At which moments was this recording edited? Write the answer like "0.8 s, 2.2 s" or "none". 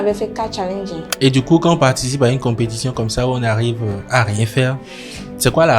1.0 s